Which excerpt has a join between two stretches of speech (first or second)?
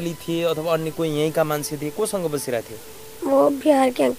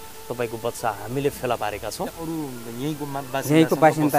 second